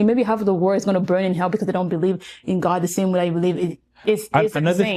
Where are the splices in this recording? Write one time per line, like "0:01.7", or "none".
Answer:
none